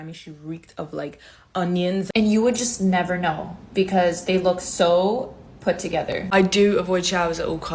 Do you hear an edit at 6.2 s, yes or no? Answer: yes